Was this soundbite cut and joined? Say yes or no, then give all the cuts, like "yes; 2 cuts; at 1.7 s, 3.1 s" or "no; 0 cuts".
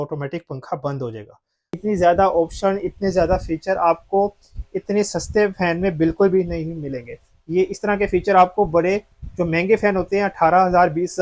yes; 1 cut; at 1.8 s